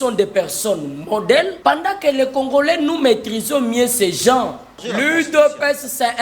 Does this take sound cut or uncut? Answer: cut